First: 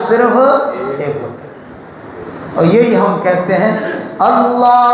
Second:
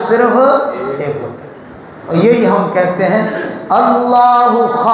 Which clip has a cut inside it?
second; 1 cut; at 2.1 s

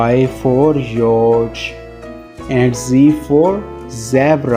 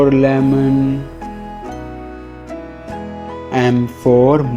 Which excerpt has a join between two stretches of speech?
second; 2 cuts; at 1.2 s, 3.5 s

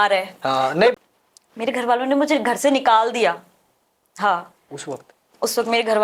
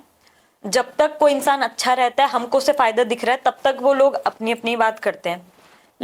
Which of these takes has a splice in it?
first; 1 cut; at 1.0 s

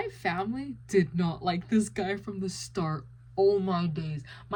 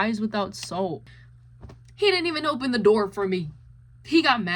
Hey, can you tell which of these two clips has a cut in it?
second; 1 cut; at 1.2 s

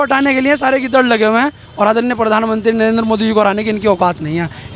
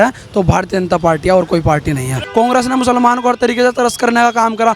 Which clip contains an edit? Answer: second; 1 cut; at 2.2 s

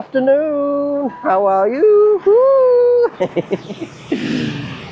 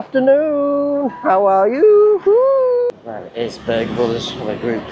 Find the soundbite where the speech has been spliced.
second; 1 cut; at 2.9 s

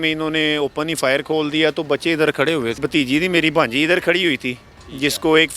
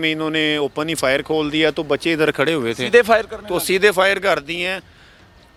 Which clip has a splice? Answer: first; 1 cut; at 2.8 s

